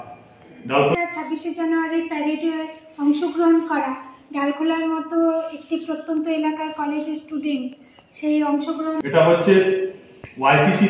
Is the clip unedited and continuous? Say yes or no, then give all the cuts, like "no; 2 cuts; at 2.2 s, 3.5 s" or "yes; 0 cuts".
no; 2 cuts; at 0.9 s, 9.0 s